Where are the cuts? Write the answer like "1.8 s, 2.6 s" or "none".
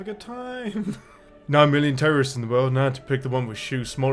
1.3 s